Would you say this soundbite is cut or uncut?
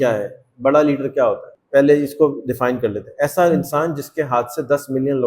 cut